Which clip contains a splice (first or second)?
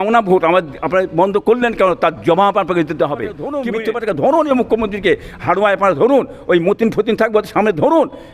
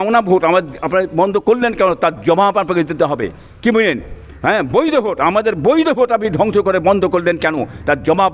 first